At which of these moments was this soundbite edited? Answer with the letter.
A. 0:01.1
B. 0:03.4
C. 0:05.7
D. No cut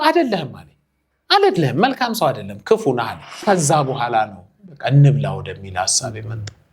B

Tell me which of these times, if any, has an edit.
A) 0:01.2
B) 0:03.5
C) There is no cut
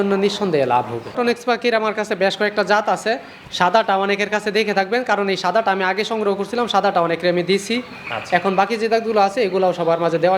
A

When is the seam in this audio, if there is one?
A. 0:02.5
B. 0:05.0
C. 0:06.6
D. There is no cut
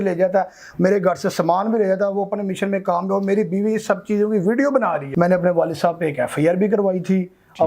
B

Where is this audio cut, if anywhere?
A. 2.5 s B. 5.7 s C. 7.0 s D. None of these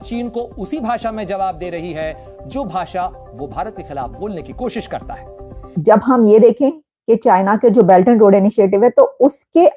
B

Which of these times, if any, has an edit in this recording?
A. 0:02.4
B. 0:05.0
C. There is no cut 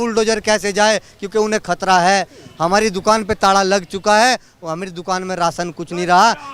C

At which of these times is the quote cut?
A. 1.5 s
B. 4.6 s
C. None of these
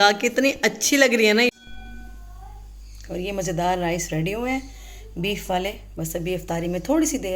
A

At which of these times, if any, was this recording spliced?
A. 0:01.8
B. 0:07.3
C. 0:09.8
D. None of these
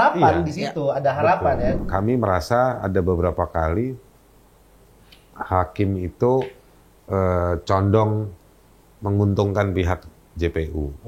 A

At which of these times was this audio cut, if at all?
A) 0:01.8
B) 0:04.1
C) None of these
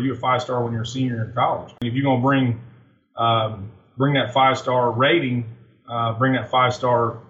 A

